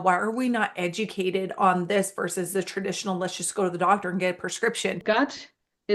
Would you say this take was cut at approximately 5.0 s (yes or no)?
yes